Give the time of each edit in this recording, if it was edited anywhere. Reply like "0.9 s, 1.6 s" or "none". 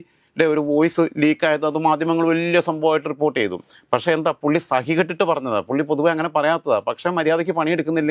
none